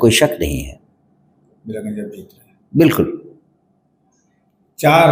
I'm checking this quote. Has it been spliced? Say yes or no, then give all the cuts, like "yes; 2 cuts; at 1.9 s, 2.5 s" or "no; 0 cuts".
no; 0 cuts